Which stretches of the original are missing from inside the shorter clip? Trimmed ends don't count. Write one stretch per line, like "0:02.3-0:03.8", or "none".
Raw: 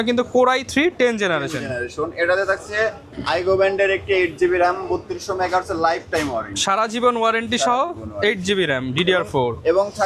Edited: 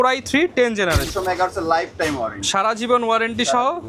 0:01.5-0:05.2